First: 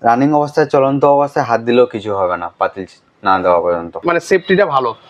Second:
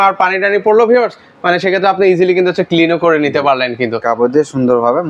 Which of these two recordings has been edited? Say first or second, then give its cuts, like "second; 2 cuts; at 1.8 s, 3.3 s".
first; 1 cut; at 4.0 s